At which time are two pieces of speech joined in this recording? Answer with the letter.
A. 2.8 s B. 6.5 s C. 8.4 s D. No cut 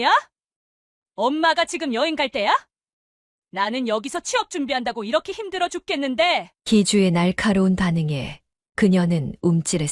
D